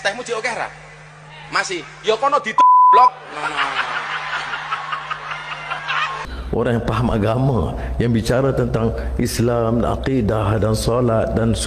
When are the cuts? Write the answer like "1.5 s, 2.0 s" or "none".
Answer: 6.2 s